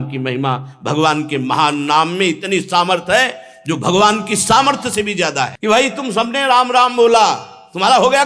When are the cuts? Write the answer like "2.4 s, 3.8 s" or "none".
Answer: 5.5 s